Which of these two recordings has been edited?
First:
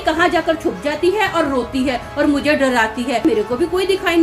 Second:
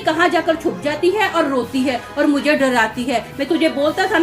first; 1 cut; at 3.2 s

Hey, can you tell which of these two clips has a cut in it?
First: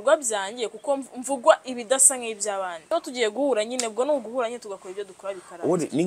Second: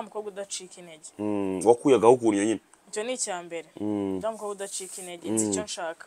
first; 1 cut; at 2.8 s

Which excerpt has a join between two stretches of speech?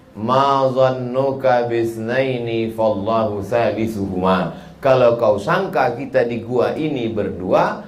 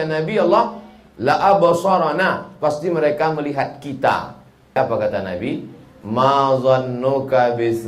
second; 1 cut; at 4.8 s

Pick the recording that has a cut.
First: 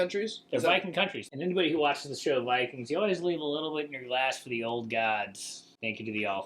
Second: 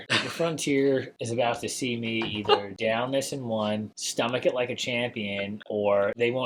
first; 1 cut; at 1.2 s

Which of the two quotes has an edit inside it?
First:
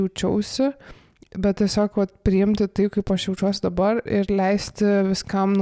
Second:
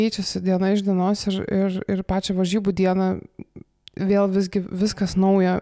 first; 1 cut; at 4.0 s

